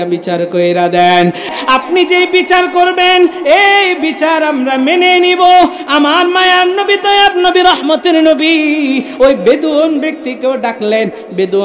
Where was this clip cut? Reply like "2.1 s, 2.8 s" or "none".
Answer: 1.5 s